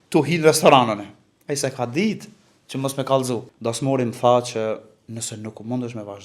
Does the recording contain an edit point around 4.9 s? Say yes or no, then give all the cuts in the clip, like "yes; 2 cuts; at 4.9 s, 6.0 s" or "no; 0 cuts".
no; 1 cut; at 3.5 s